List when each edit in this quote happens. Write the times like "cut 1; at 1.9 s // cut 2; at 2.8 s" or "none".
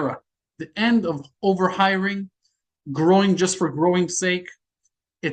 none